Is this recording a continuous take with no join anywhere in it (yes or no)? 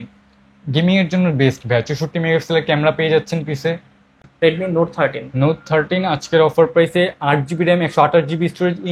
no